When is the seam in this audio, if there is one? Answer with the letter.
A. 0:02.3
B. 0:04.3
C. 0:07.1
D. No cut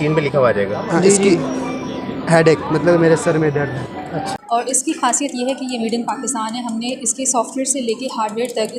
B